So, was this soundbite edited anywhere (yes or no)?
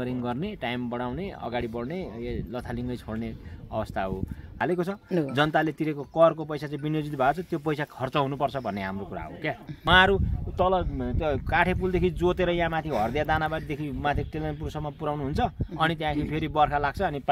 yes